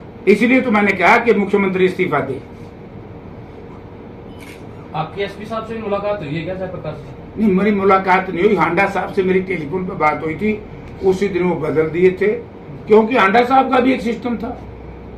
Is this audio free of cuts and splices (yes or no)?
yes